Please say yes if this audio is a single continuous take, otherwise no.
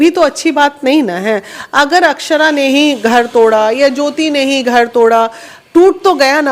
yes